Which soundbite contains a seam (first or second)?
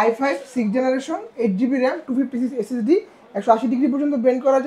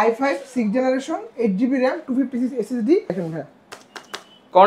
second